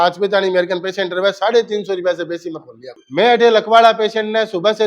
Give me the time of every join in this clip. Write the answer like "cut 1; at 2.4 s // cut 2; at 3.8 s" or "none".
cut 1; at 3.0 s